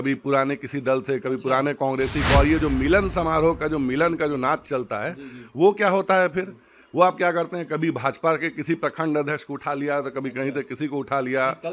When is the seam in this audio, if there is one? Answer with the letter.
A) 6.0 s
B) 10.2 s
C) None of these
C